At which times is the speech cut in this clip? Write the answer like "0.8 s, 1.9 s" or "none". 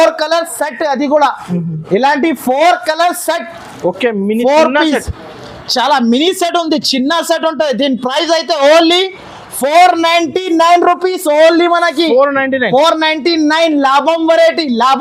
none

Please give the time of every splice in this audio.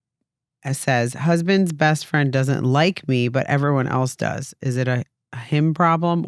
none

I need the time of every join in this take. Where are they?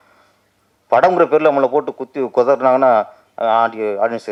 none

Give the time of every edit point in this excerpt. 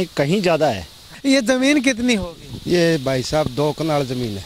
1.1 s

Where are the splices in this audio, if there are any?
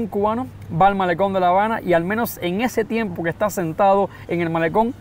none

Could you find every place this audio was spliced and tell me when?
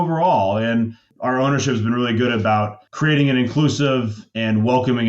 1.0 s, 2.8 s

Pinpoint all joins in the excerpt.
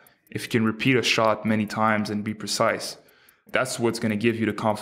3.4 s

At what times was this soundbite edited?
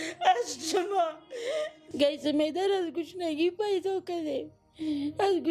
1.8 s

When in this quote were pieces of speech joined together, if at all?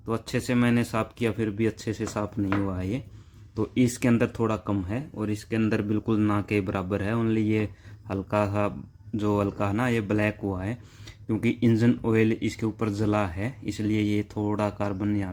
none

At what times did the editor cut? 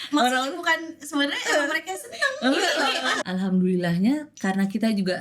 3.1 s

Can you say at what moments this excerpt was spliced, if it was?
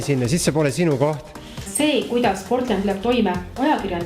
1.7 s

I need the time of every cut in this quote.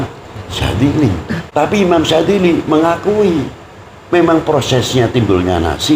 1.4 s

